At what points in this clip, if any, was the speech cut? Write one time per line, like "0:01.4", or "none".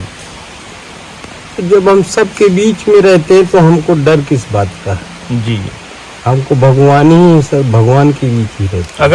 none